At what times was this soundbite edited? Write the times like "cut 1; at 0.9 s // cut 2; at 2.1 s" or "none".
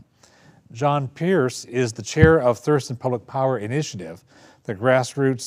cut 1; at 2.4 s